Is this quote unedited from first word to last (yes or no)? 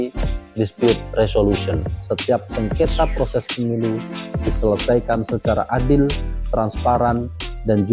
no